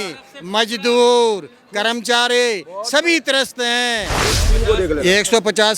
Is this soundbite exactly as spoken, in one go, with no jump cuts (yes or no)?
no